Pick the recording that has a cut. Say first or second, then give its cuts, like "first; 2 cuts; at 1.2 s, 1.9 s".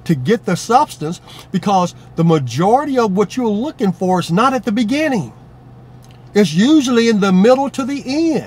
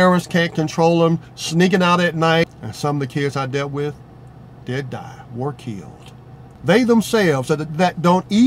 second; 2 cuts; at 2.6 s, 6.5 s